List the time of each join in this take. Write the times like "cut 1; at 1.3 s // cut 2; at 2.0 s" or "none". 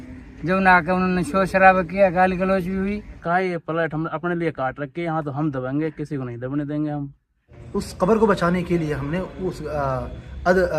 cut 1; at 3.2 s // cut 2; at 7.5 s